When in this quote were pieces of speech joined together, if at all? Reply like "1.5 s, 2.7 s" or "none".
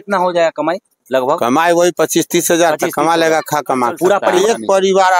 4.3 s